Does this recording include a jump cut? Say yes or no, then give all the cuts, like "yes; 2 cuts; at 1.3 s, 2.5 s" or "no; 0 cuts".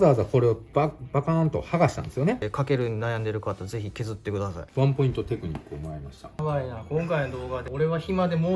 yes; 3 cuts; at 2.5 s, 4.6 s, 6.4 s